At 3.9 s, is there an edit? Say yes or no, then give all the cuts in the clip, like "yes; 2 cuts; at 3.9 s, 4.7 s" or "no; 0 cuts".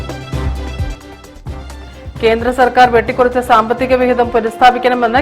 no; 1 cut; at 1.7 s